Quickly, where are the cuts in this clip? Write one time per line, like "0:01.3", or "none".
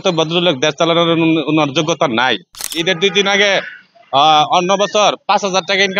0:02.7